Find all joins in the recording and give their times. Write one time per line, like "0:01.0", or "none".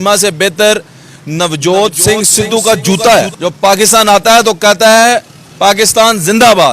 0:03.3